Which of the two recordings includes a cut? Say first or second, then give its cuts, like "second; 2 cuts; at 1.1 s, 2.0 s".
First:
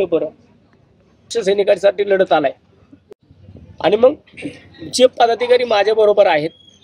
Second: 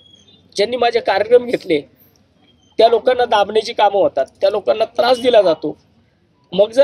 first; 1 cut; at 1.3 s